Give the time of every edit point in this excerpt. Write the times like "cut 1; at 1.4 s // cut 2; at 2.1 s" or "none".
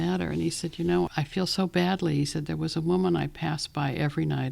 cut 1; at 1.1 s